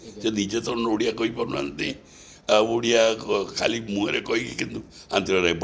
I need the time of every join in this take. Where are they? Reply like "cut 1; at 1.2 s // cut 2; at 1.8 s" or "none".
none